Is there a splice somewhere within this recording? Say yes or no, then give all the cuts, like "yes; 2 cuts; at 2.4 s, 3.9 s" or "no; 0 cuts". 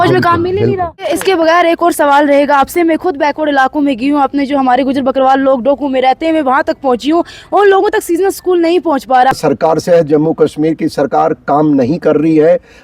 yes; 2 cuts; at 1.1 s, 9.3 s